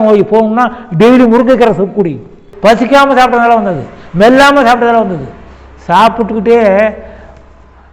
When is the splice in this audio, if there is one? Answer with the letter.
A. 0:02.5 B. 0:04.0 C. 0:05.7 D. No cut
A